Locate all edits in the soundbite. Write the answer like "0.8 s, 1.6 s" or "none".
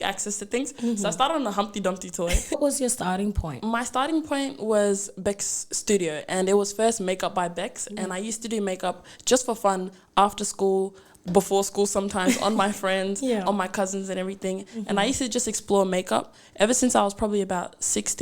2.6 s